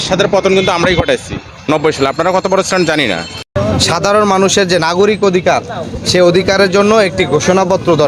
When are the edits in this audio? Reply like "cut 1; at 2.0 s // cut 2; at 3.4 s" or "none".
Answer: cut 1; at 3.5 s